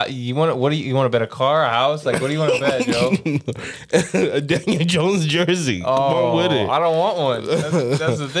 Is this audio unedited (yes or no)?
yes